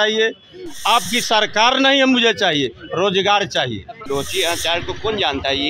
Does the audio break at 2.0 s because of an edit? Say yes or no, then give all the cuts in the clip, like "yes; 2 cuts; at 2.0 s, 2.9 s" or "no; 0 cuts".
no; 1 cut; at 3.9 s